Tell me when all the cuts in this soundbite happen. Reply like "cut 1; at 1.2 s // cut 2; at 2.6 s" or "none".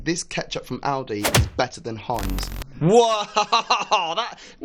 none